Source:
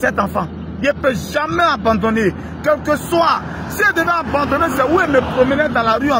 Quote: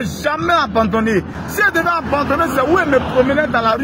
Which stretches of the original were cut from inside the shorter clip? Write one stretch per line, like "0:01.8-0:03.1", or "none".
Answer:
0:02.5-0:03.6

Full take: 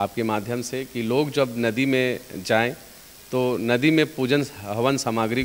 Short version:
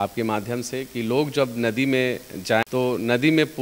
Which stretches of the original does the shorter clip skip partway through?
0:02.7-0:03.3

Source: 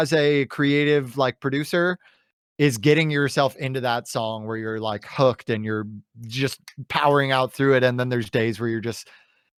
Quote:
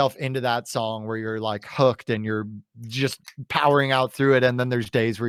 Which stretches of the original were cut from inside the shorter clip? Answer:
none

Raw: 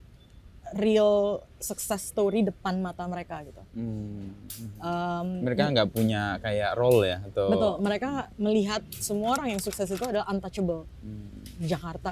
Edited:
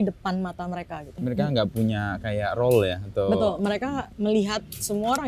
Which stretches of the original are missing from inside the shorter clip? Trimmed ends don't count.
0:03.5-0:05.3

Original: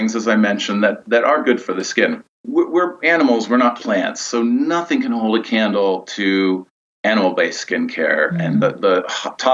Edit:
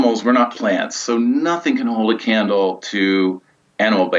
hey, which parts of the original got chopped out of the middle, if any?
none

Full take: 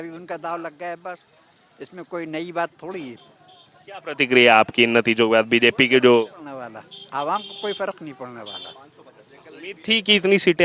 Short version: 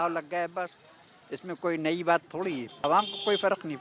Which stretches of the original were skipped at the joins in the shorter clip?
0:03.3-0:07.2

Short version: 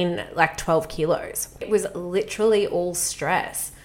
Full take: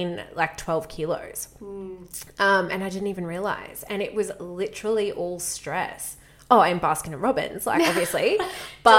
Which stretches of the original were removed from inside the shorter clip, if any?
0:01.6-0:04.1

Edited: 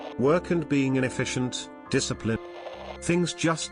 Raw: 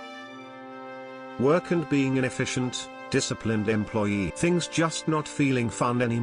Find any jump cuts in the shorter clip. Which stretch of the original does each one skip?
0:03.7-0:03.8

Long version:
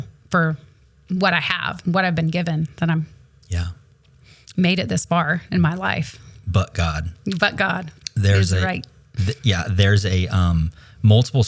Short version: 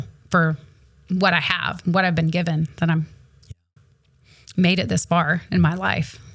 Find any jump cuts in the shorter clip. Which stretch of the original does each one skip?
none

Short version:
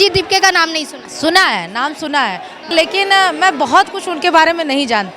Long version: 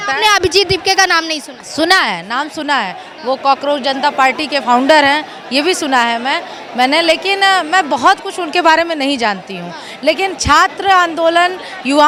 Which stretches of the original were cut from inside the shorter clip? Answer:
0:03.3-0:07.0

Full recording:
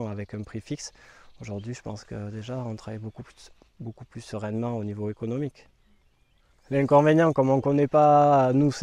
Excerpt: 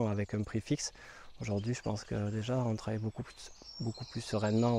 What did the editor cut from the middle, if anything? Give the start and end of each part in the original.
none

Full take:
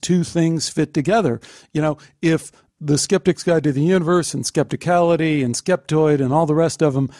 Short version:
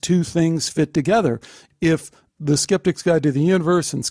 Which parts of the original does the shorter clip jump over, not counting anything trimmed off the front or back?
0:01.6-0:02.0

